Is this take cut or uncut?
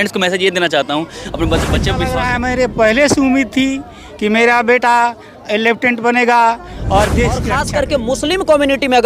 cut